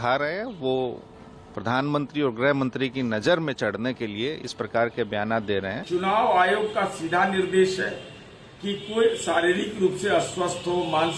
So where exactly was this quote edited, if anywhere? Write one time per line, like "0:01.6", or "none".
0:05.8